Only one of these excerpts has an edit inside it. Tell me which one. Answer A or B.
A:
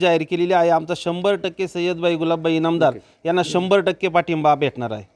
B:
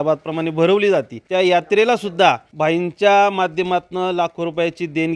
B